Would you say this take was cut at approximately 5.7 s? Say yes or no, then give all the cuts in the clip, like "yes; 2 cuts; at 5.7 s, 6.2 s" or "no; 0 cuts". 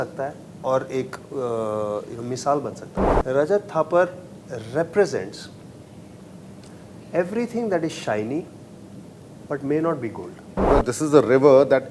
no; 2 cuts; at 2.9 s, 10.7 s